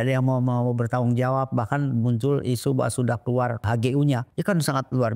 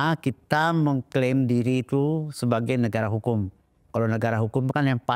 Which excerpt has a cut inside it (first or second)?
first